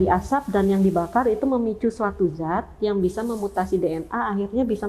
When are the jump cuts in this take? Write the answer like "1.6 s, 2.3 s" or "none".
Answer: none